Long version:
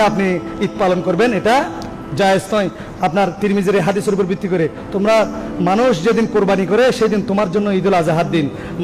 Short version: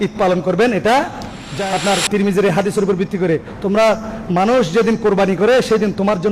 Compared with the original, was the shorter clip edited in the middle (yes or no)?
yes